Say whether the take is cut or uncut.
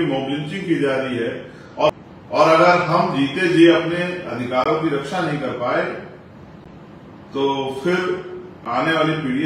cut